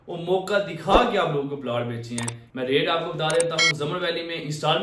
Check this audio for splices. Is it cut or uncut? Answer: cut